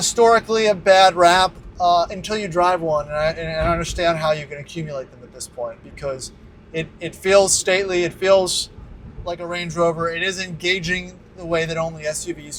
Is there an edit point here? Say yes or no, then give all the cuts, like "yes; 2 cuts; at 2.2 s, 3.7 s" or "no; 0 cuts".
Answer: no; 0 cuts